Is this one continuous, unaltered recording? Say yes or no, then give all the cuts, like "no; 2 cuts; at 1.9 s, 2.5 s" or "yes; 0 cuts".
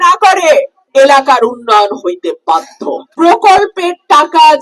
no; 1 cut; at 3.0 s